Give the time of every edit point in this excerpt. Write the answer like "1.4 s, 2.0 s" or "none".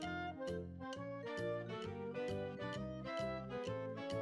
none